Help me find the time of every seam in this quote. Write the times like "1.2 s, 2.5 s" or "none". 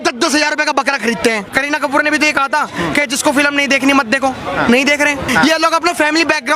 1.5 s, 5.2 s